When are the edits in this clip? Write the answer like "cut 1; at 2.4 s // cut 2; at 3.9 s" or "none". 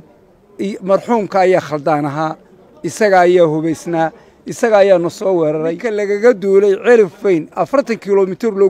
cut 1; at 5.9 s